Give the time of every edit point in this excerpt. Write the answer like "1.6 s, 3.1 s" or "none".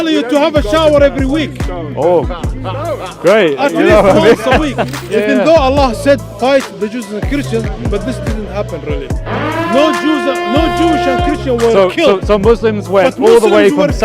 5.0 s

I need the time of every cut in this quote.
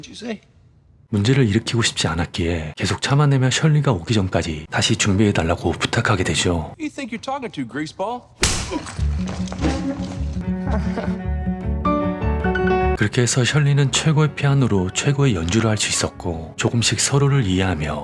none

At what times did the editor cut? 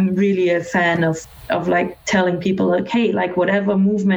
1.3 s

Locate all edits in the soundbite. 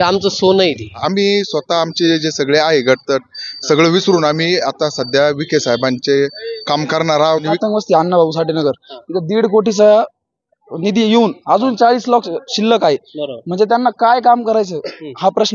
1.0 s, 7.4 s

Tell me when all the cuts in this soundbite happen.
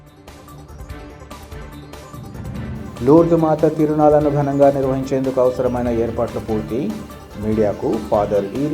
2.5 s

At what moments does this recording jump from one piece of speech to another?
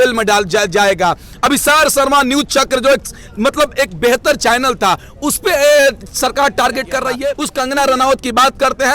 7.4 s

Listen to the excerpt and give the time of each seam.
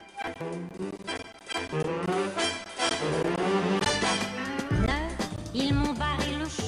none

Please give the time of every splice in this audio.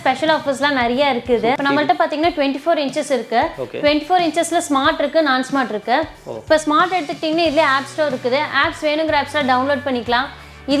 1.6 s

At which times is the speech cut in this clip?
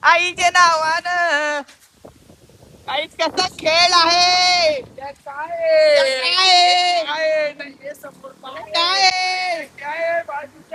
none

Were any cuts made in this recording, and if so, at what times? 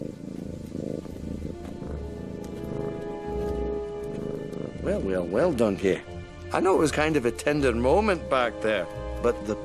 none

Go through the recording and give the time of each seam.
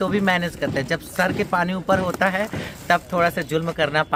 none

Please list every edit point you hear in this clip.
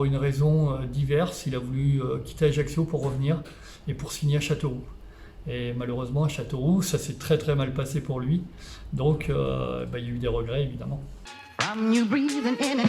11.0 s

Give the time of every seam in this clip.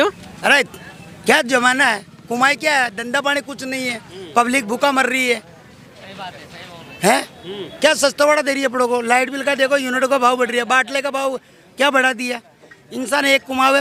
none

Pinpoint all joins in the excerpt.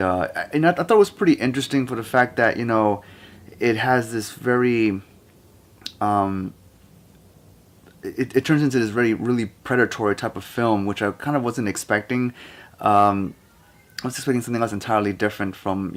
none

